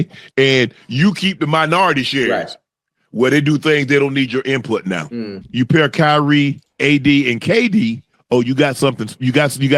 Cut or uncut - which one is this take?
cut